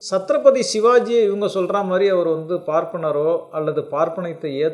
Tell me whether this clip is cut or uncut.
uncut